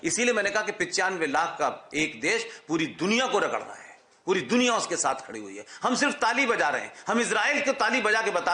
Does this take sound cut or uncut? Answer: uncut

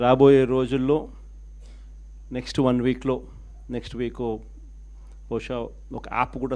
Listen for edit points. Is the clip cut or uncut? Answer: uncut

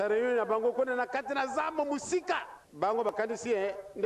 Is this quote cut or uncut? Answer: cut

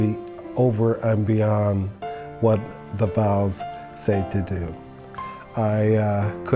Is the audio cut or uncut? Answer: uncut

